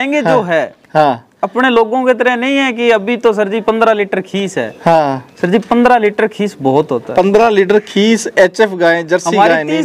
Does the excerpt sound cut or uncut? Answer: uncut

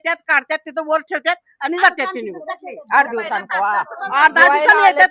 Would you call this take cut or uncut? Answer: uncut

